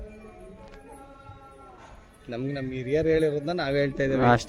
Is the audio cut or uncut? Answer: uncut